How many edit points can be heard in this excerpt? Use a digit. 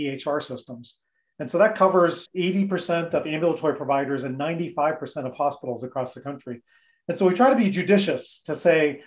1